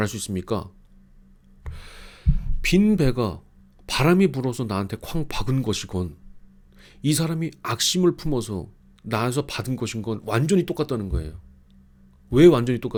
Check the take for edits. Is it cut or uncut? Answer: uncut